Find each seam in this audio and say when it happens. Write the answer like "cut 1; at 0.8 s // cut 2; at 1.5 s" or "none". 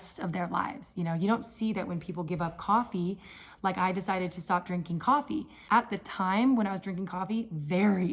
cut 1; at 5.6 s